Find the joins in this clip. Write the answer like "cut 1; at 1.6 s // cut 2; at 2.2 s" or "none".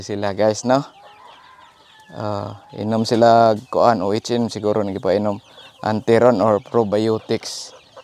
none